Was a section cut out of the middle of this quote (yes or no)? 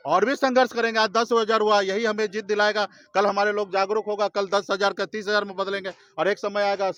no